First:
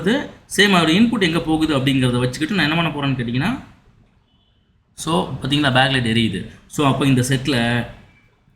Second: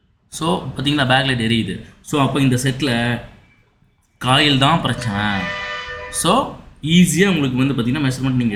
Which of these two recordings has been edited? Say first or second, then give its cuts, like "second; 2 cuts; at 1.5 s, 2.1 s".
first; 1 cut; at 3.2 s